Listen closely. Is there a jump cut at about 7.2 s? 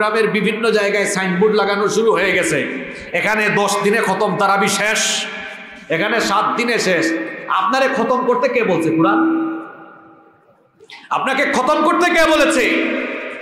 no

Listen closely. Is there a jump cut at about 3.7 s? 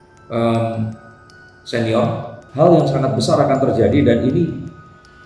no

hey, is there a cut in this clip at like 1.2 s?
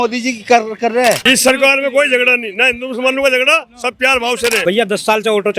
yes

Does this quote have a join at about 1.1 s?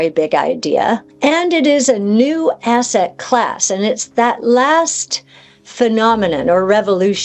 yes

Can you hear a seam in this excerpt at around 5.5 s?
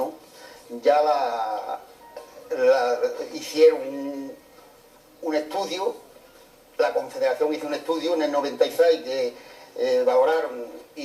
yes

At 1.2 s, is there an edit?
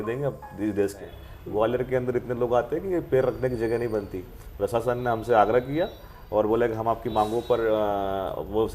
yes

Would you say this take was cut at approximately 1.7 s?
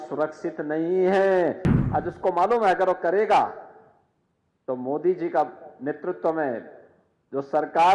yes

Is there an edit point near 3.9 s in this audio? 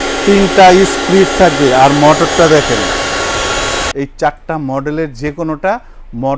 yes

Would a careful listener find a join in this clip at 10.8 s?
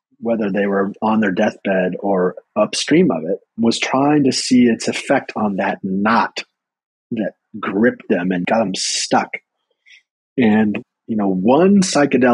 yes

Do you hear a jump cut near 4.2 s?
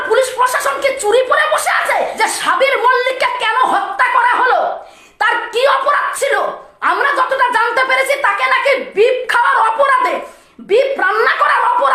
no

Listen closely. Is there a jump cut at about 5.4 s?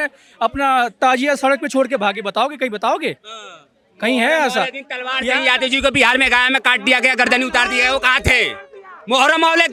no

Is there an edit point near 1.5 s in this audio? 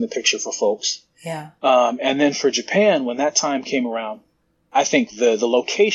yes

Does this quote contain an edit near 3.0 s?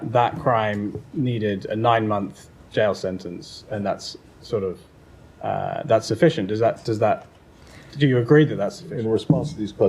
no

